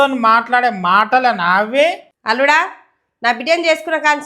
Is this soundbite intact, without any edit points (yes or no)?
no